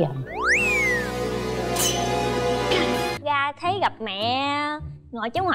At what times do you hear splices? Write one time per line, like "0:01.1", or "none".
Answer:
0:03.2